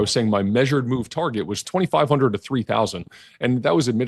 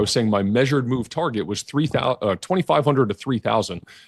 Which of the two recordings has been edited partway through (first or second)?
first